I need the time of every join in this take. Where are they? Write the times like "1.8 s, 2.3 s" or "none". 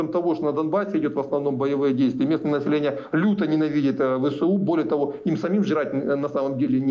none

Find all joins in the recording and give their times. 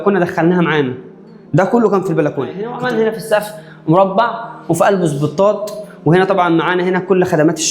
2.7 s

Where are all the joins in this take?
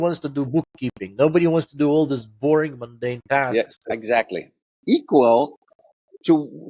4.7 s

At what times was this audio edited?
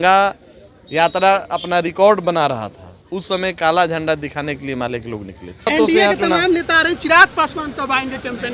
5.7 s

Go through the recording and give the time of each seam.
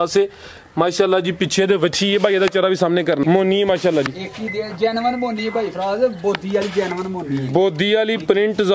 3.2 s

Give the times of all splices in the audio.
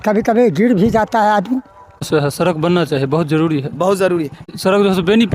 2.1 s, 4.5 s

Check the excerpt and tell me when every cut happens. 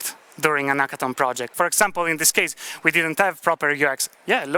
1.5 s

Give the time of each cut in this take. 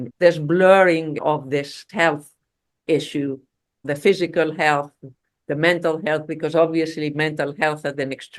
1.9 s

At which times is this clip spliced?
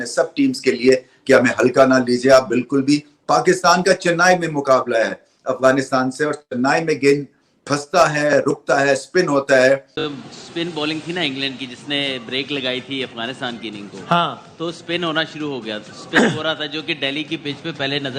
10.0 s

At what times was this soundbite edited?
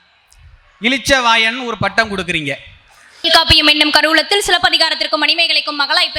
3.2 s

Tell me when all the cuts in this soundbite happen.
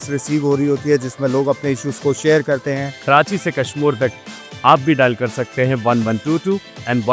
3.0 s

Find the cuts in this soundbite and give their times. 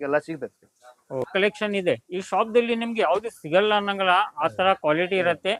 1.3 s

